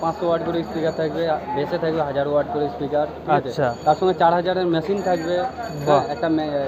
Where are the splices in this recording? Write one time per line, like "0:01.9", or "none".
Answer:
none